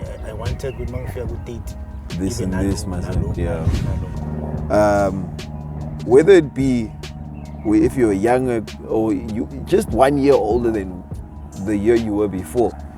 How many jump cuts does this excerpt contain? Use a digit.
1